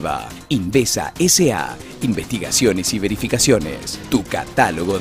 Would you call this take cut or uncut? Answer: uncut